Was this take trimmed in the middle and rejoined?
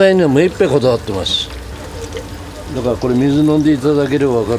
yes; 1 cut; at 1.7 s

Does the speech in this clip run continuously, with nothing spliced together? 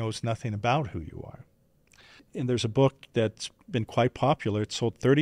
no; 1 cut; at 2.2 s

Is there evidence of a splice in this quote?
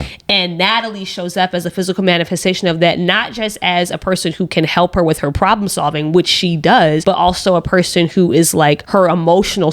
yes; 2 cuts; at 7.0 s, 8.8 s

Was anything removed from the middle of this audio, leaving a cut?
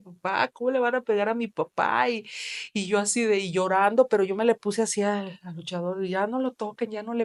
no; 0 cuts

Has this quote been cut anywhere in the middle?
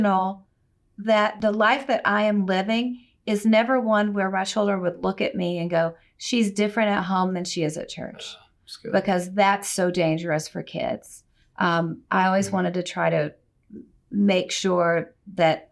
yes; 1 cut; at 1.4 s

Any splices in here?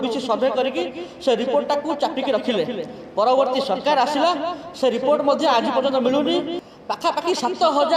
yes; 1 cut; at 6.6 s

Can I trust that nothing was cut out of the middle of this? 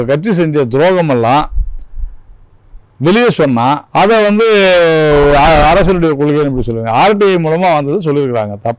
no; 1 cut; at 3.8 s

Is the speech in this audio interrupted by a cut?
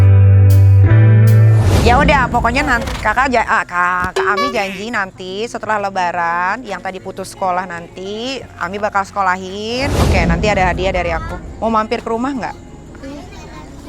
yes; 2 cuts; at 1.7 s, 10.0 s

